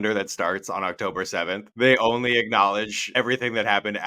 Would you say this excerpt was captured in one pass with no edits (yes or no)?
no